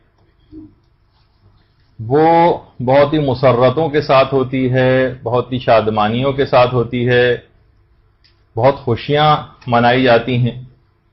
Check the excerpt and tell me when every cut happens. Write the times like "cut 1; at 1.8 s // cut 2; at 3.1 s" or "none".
cut 1; at 6.5 s